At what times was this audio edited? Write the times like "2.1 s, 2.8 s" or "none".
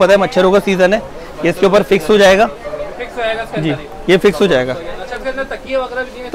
none